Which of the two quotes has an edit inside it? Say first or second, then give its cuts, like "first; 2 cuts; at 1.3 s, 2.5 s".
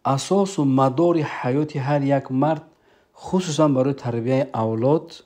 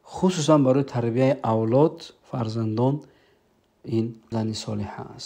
second; 1 cut; at 4.2 s